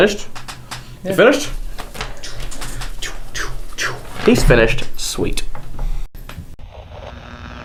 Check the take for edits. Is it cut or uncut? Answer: uncut